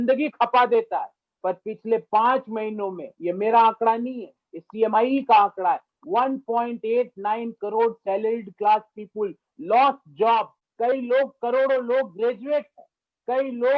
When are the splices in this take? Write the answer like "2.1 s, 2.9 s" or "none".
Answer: 10.6 s